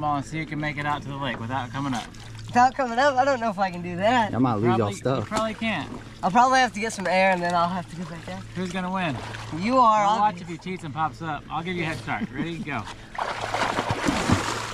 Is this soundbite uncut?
yes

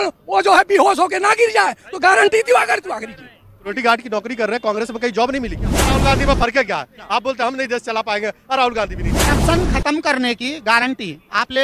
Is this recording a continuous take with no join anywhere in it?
no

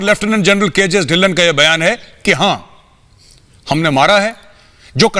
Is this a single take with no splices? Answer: yes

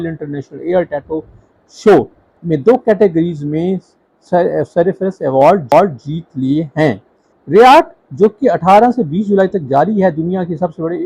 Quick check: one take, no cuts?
yes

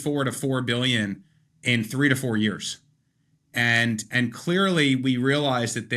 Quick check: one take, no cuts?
yes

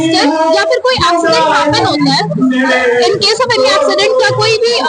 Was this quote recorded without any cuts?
yes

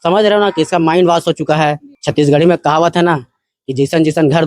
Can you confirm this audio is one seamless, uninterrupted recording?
no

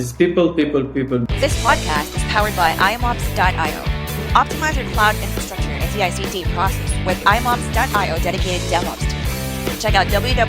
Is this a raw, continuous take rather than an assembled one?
no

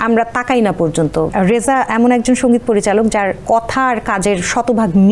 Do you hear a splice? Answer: yes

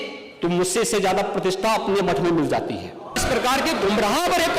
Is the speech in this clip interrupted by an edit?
yes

